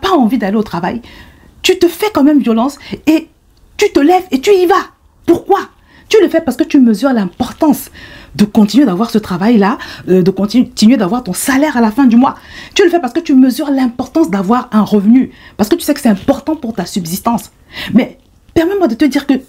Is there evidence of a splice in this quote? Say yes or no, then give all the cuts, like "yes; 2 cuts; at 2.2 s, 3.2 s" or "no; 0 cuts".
no; 0 cuts